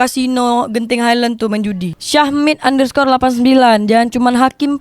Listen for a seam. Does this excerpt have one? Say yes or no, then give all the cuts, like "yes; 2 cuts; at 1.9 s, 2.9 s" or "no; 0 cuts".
yes; 1 cut; at 1.9 s